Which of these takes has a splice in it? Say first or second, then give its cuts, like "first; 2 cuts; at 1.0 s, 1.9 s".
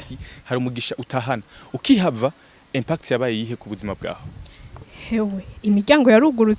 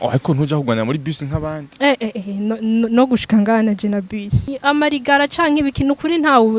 second; 1 cut; at 4.5 s